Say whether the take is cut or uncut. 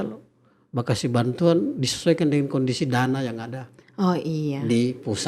uncut